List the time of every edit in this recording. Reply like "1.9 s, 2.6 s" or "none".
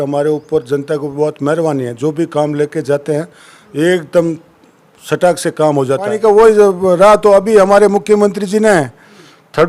6.1 s